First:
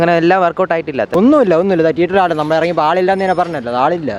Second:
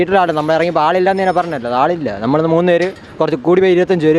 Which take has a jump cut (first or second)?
first